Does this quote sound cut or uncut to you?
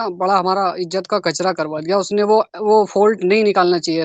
uncut